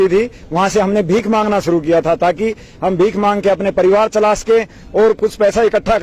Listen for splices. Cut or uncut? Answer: uncut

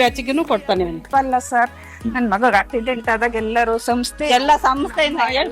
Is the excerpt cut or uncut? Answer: cut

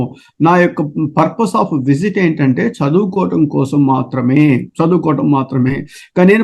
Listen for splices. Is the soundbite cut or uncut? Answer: uncut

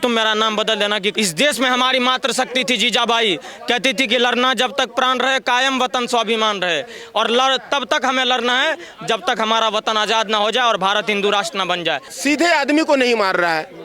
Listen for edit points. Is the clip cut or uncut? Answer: cut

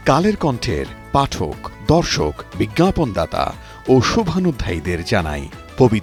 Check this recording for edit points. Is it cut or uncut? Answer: uncut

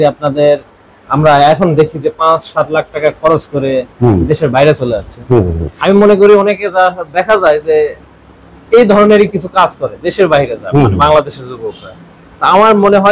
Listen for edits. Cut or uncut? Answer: uncut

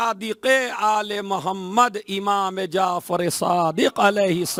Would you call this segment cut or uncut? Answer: uncut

